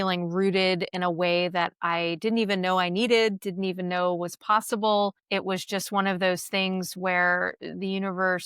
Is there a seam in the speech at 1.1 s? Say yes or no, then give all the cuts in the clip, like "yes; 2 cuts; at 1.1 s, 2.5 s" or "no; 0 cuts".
no; 1 cut; at 5.2 s